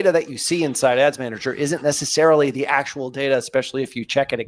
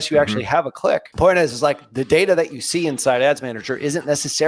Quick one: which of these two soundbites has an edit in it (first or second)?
second